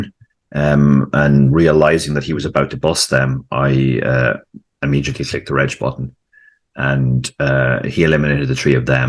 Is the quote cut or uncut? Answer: uncut